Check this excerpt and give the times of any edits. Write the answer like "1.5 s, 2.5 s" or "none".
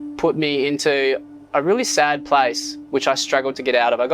none